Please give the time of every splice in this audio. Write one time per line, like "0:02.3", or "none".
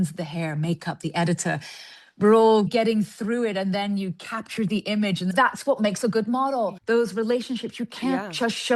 0:02.7
0:05.3
0:06.8